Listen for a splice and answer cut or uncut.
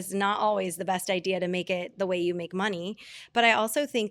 uncut